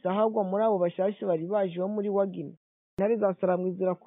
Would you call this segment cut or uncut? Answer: cut